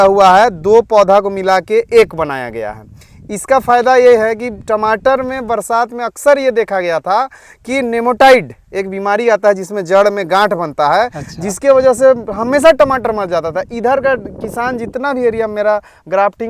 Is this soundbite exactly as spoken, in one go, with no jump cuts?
yes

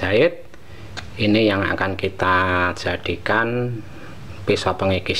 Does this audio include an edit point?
no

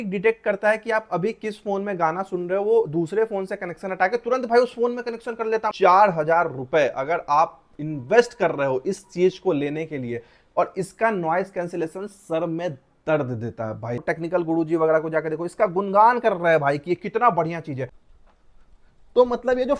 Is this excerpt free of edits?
no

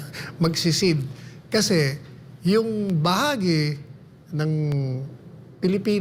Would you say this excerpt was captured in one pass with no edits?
yes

